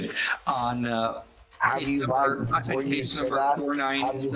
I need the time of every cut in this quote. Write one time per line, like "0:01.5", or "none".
none